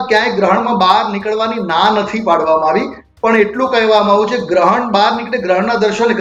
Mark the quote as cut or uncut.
uncut